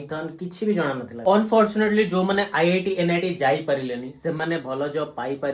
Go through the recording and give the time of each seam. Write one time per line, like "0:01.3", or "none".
0:01.2